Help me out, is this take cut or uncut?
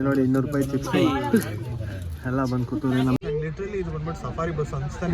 cut